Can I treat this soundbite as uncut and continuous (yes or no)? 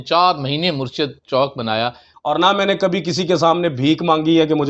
no